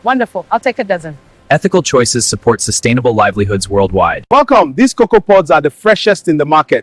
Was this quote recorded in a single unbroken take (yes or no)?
no